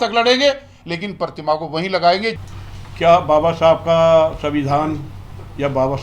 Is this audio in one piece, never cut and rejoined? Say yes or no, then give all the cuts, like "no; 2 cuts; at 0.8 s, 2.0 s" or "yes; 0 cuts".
yes; 0 cuts